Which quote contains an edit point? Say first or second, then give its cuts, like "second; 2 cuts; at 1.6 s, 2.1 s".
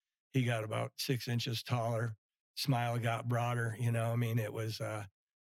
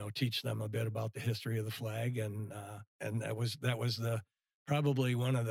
second; 1 cut; at 2.9 s